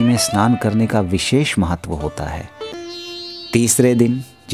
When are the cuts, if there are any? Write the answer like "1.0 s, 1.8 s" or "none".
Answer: 2.8 s